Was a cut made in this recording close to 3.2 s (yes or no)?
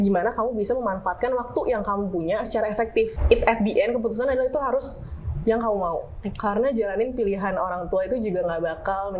yes